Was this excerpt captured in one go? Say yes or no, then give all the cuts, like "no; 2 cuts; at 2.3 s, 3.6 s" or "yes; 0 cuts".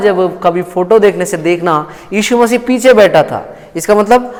yes; 0 cuts